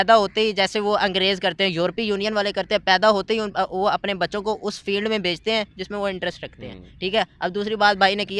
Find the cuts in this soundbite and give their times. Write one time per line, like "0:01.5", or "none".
none